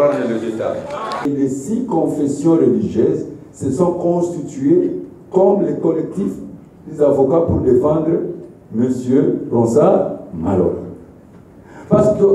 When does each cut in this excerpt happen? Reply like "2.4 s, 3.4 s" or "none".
1.2 s